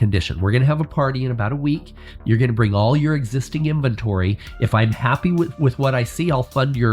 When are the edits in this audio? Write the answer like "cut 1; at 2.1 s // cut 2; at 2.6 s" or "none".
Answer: none